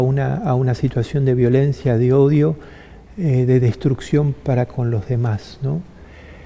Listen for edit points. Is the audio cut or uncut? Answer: uncut